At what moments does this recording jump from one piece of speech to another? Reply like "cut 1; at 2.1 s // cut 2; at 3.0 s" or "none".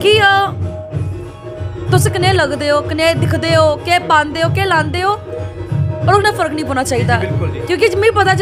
none